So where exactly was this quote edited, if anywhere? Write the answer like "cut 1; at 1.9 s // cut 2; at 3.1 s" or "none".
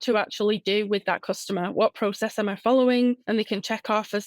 cut 1; at 3.2 s